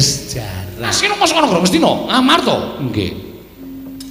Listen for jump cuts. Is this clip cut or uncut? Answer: cut